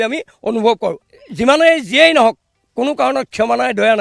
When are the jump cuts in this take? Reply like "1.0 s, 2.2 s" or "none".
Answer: 1.1 s